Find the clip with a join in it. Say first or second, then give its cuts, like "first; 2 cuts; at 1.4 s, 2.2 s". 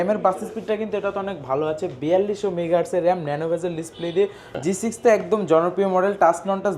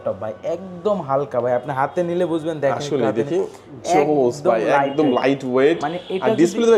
first; 1 cut; at 4.5 s